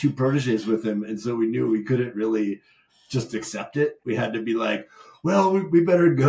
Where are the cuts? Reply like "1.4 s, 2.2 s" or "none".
none